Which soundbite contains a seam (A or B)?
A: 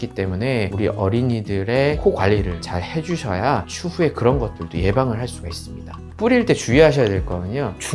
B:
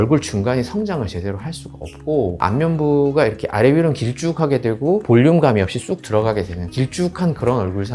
A